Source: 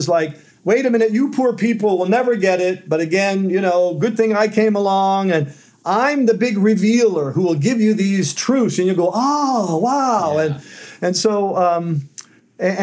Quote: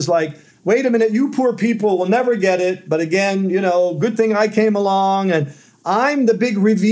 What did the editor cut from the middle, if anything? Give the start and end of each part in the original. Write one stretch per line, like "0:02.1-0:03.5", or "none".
none